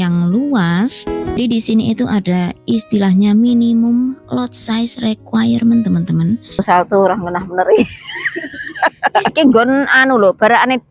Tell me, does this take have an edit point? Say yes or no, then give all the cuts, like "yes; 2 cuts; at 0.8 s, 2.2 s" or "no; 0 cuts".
yes; 3 cuts; at 1.4 s, 6.6 s, 9.3 s